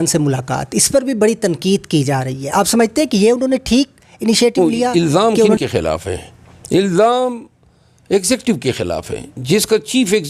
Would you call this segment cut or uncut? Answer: cut